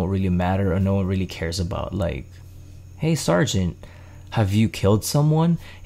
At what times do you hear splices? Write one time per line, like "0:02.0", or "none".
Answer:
none